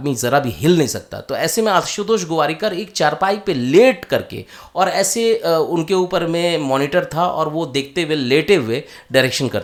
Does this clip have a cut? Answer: no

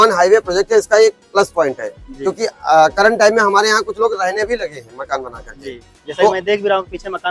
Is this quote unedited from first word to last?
yes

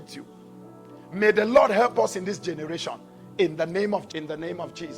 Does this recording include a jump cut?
yes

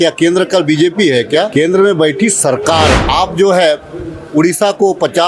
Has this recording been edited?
yes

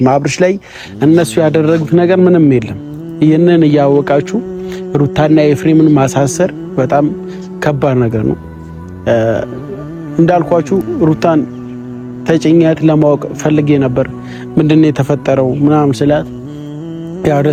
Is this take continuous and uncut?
yes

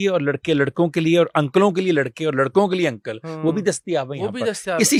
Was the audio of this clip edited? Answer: no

